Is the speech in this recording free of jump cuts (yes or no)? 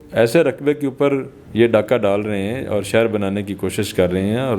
no